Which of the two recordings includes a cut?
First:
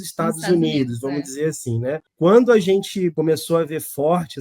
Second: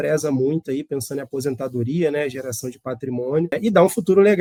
first; 2 cuts; at 2.1 s, 3.1 s

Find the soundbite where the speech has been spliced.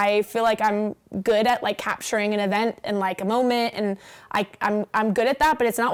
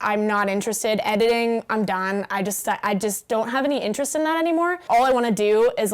second; 1 cut; at 4.8 s

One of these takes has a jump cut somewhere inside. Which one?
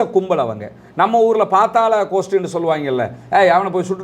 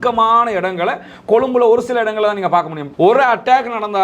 second; 1 cut; at 2.8 s

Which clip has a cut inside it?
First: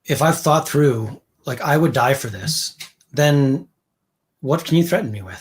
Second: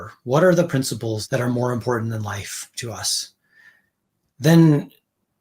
second; 1 cut; at 1.2 s

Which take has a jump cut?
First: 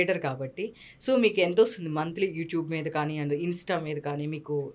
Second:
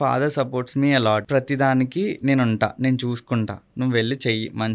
second; 1 cut; at 1.2 s

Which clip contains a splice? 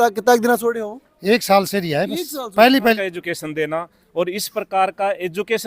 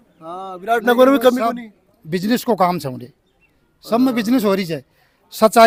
first; 1 cut; at 3.0 s

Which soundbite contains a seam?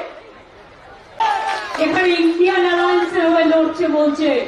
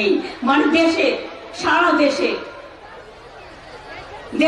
first; 1 cut; at 1.2 s

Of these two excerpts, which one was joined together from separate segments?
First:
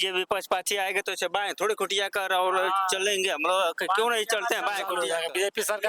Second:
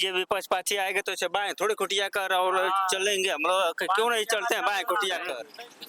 first; 1 cut; at 4.9 s

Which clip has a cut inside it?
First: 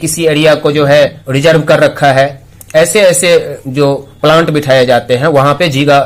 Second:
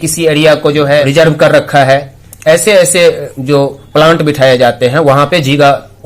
second; 1 cut; at 1.1 s

